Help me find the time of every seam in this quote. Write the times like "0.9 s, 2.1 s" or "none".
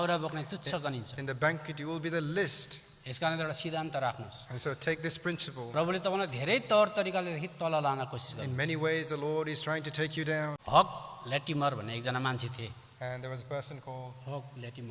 10.6 s